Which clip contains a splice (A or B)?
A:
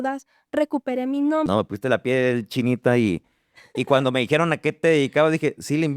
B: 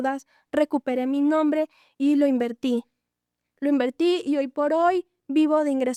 A